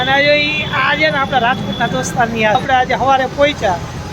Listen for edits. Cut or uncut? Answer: cut